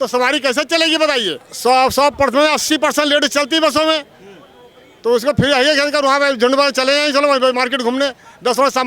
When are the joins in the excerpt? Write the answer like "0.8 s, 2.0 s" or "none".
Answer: 1.4 s